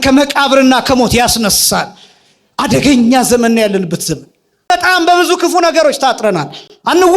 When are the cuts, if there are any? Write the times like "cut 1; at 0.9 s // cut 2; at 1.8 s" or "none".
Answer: cut 1; at 4.7 s